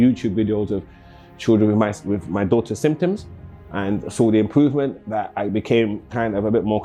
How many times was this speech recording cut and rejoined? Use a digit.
0